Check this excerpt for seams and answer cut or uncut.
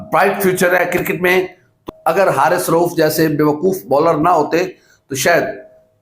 cut